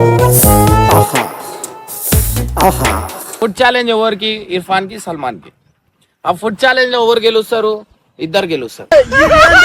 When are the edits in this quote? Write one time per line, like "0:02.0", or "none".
0:03.2